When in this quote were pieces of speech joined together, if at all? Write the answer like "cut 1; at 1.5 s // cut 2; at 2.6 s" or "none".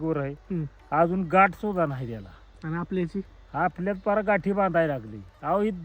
none